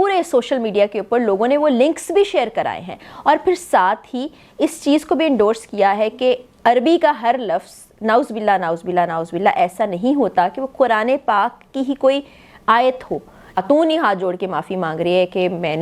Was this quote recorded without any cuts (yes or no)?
no